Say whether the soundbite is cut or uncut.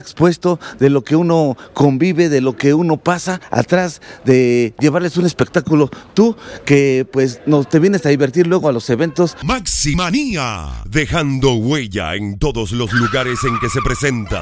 cut